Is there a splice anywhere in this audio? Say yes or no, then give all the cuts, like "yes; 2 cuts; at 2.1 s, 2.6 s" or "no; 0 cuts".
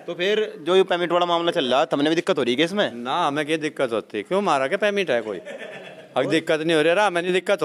no; 0 cuts